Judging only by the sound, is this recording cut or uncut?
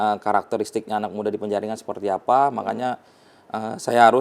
uncut